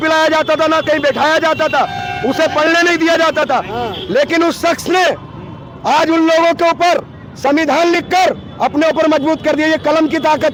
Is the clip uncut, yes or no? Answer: yes